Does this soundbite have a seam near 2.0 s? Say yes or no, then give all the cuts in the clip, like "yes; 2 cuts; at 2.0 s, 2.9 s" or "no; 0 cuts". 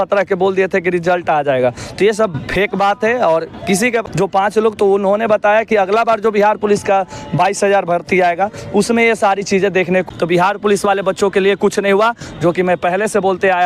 no; 2 cuts; at 4.0 s, 10.1 s